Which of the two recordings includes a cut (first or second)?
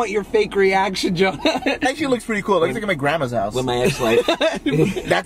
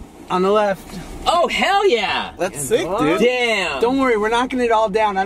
first